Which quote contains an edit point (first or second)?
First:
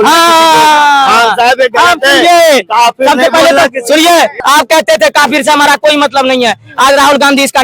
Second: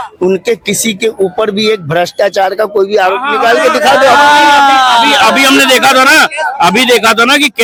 first